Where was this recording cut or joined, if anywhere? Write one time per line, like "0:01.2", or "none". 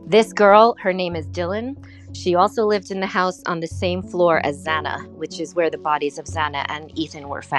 none